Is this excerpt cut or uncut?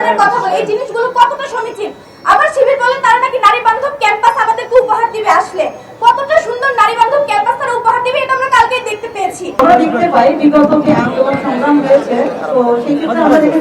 cut